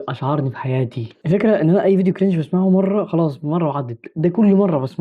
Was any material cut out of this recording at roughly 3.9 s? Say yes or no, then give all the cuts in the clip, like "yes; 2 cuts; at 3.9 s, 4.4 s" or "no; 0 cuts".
no; 1 cut; at 1.1 s